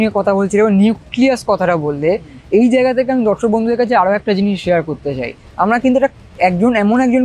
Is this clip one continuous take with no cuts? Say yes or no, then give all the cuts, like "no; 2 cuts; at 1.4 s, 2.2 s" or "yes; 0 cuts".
no; 1 cut; at 5.4 s